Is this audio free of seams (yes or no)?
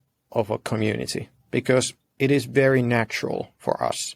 yes